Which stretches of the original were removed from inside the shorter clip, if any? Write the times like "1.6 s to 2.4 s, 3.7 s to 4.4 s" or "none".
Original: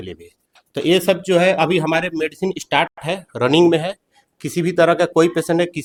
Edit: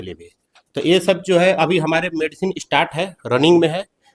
2.9 s to 3.0 s